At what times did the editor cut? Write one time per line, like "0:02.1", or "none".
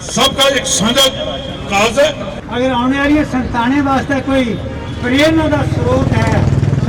0:02.3